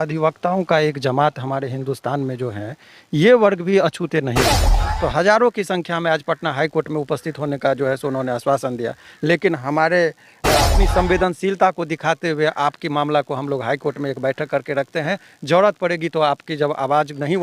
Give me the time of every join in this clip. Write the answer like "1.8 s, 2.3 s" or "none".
4.8 s, 10.7 s